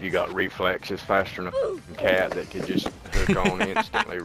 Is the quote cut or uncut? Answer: uncut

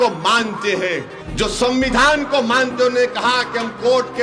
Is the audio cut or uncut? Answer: cut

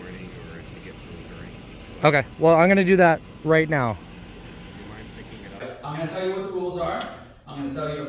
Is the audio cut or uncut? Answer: cut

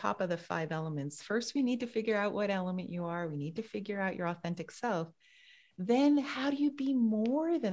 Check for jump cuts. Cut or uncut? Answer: uncut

